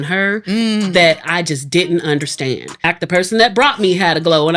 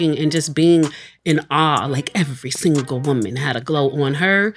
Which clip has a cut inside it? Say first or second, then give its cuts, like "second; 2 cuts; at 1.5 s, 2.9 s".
first; 1 cut; at 2.9 s